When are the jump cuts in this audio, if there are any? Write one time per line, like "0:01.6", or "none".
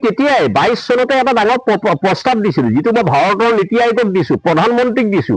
none